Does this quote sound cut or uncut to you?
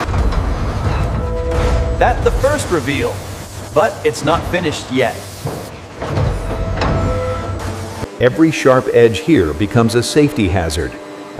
uncut